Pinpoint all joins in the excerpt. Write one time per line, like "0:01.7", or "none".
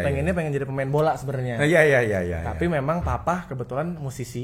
none

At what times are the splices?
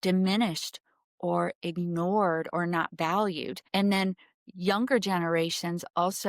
0:03.5

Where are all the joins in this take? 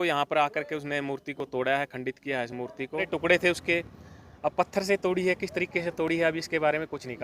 0:03.1

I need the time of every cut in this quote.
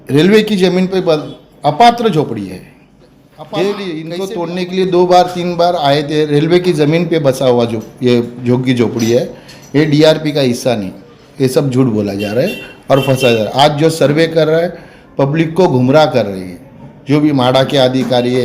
0:04.2

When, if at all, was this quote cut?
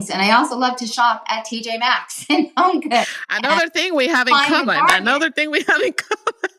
none

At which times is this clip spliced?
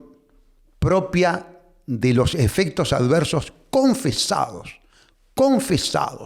none

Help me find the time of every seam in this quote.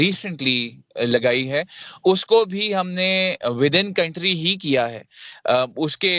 none

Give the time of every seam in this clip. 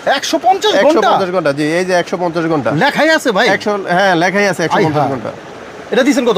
none

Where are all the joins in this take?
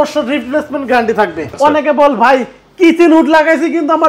0:01.4

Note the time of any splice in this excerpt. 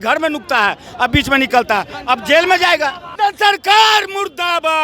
0:03.0

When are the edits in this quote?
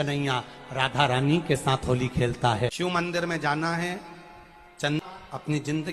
0:02.7
0:05.0

